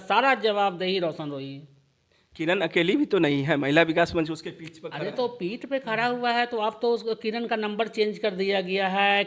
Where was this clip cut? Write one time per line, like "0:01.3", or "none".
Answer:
none